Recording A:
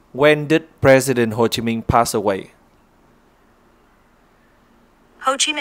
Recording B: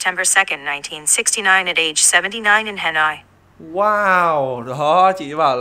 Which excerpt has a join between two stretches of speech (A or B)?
A